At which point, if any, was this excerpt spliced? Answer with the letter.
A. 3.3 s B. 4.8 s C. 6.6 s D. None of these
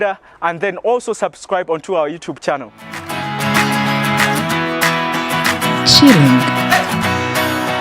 A